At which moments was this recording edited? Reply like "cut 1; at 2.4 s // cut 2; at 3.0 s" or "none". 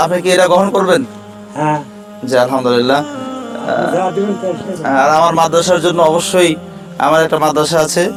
none